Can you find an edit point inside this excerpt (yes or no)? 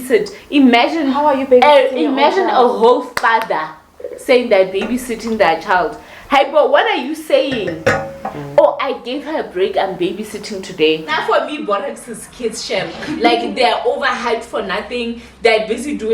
yes